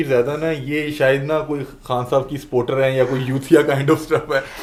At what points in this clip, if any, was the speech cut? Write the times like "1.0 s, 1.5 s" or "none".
none